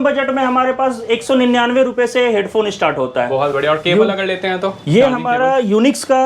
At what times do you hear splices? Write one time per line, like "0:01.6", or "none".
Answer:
none